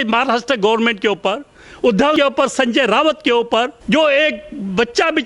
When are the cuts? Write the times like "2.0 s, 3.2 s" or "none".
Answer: 2.1 s, 3.8 s